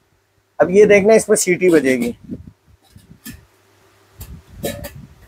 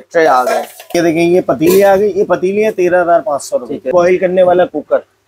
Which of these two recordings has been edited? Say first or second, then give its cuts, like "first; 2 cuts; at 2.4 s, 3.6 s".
second; 2 cuts; at 1.0 s, 3.9 s